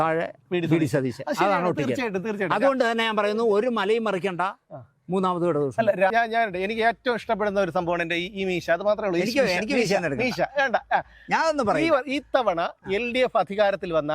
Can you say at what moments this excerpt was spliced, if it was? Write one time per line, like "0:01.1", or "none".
0:06.1

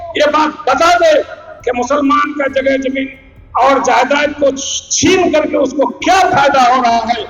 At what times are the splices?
none

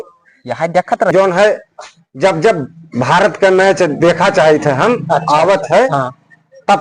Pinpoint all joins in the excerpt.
0:01.1

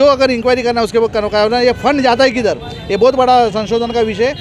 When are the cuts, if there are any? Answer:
none

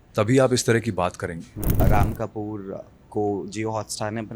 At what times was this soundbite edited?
0:01.8

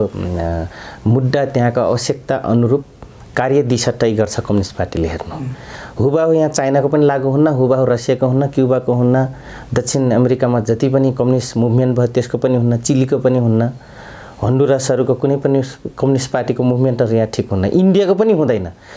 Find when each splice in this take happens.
none

